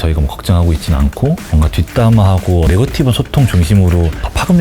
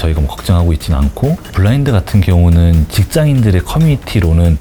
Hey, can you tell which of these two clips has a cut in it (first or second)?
first